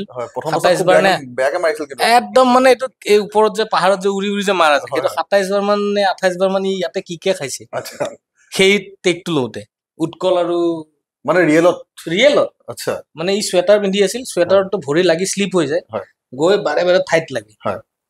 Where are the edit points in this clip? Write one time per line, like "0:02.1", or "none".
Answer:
none